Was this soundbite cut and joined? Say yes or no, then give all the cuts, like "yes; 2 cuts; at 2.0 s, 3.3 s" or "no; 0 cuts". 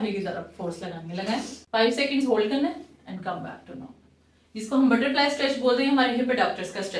yes; 1 cut; at 1.6 s